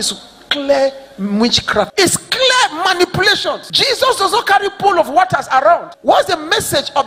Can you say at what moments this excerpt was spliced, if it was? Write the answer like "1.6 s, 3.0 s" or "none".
1.9 s, 3.7 s, 5.9 s